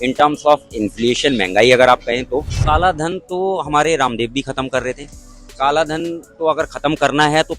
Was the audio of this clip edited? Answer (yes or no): yes